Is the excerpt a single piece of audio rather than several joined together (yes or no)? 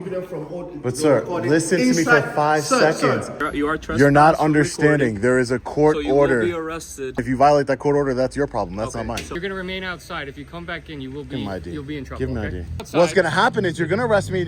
no